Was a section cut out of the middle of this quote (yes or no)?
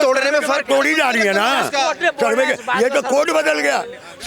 no